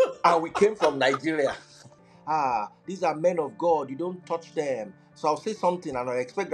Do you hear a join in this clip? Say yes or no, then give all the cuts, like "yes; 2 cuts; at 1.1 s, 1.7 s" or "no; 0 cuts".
yes; 1 cut; at 2.0 s